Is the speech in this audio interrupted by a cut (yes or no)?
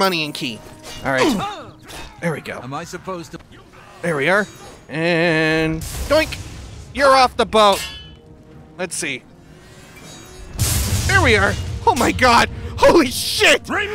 yes